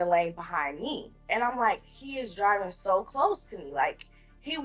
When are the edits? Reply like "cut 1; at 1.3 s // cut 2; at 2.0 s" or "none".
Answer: cut 1; at 1.2 s

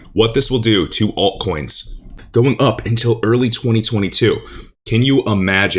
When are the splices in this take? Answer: cut 1; at 2.1 s

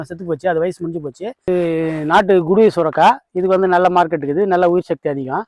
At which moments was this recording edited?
cut 1; at 1.5 s

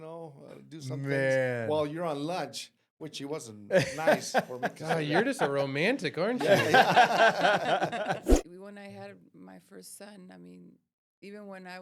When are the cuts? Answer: cut 1; at 8.3 s

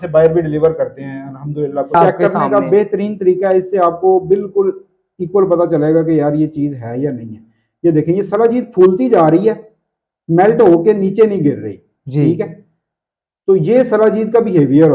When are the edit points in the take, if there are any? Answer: cut 1; at 1.9 s

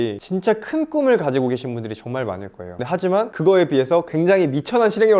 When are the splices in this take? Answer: none

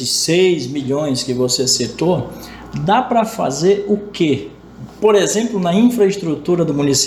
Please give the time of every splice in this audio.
none

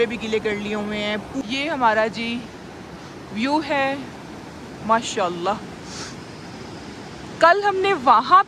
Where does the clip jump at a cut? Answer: cut 1; at 1.4 s

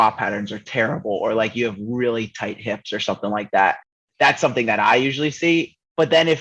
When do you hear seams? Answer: none

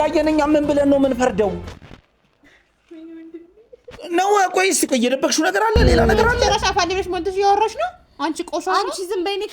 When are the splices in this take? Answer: cut 1; at 6.2 s

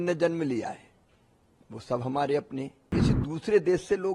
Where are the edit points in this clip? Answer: cut 1; at 3.0 s

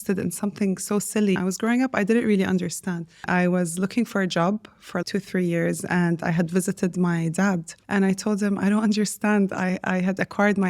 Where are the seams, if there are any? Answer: cut 1; at 1.4 s // cut 2; at 3.2 s // cut 3; at 5.0 s // cut 4; at 7.7 s

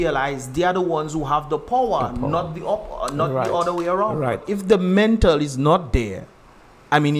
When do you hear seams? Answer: cut 1; at 4.4 s

